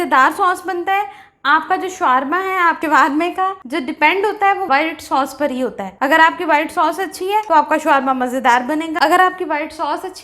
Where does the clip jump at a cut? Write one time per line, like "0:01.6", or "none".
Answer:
none